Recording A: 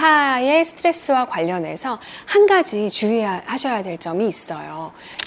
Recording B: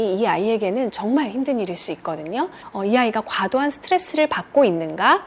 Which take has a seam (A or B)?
B